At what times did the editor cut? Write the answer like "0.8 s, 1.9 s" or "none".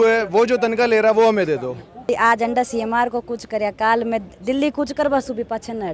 2.0 s